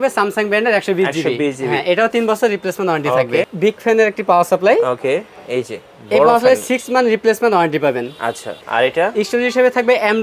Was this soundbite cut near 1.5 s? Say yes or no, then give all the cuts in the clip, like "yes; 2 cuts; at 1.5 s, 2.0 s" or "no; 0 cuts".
no; 2 cuts; at 3.5 s, 8.6 s